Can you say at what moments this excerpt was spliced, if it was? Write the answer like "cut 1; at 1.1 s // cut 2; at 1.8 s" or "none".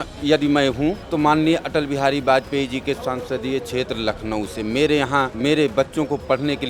cut 1; at 1.0 s // cut 2; at 5.3 s